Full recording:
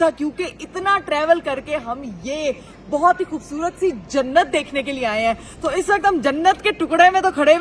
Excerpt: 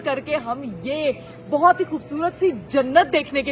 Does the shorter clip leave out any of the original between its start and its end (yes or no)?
no